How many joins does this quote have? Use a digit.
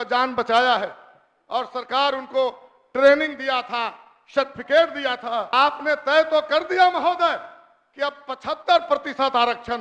1